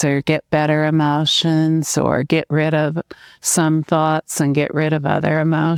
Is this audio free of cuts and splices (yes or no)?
yes